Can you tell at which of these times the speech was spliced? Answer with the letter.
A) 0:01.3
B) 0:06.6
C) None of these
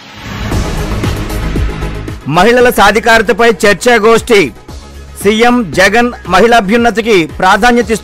C